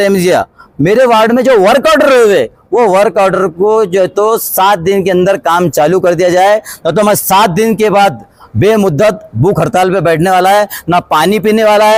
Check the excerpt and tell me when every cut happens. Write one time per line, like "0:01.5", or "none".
none